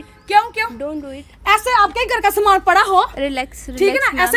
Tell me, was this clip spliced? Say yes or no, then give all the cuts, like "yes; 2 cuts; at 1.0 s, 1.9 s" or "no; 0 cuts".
no; 0 cuts